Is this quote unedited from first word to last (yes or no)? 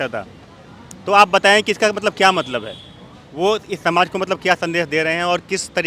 yes